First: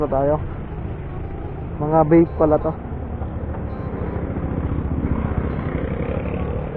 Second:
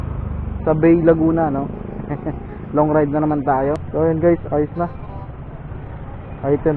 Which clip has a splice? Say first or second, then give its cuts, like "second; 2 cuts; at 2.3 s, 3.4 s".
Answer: second; 1 cut; at 3.8 s